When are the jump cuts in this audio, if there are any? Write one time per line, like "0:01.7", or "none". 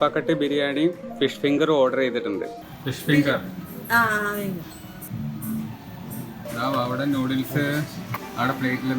0:05.0